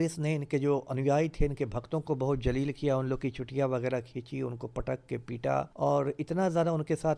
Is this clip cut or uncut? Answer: cut